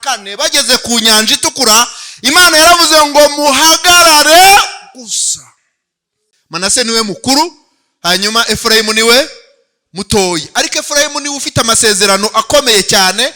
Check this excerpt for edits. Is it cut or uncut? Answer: cut